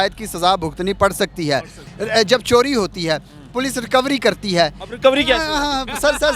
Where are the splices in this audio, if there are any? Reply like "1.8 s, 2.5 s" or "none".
1.8 s